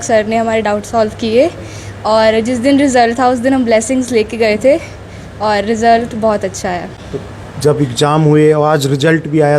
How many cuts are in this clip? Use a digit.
0